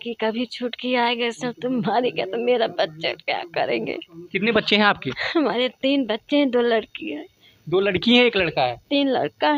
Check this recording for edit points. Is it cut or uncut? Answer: uncut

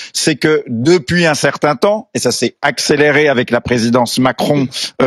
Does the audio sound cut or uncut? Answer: uncut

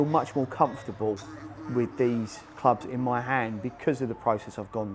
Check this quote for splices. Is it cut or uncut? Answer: uncut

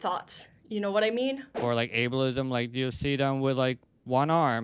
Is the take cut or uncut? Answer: cut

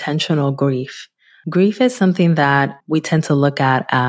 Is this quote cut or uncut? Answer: uncut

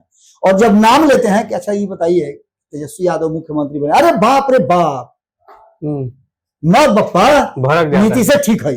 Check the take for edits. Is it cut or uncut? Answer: uncut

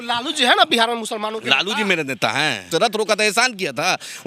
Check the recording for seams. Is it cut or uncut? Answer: cut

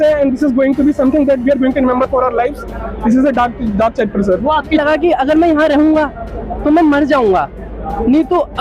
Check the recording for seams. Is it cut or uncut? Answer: cut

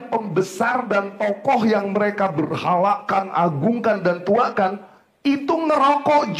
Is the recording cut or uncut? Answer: uncut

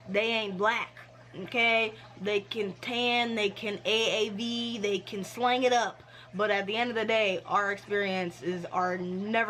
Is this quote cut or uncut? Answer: uncut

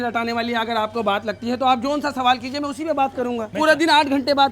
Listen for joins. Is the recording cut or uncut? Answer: cut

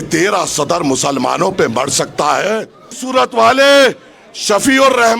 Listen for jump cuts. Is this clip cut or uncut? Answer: cut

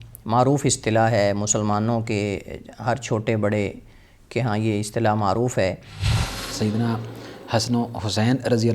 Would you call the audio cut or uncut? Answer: cut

